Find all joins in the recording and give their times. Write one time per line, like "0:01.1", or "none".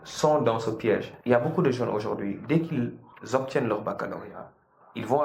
0:01.1